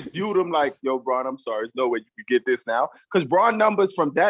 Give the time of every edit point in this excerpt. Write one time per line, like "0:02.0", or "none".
none